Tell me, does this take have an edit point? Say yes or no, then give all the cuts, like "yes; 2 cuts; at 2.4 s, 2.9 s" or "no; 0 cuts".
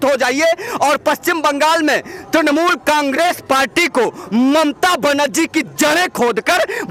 no; 0 cuts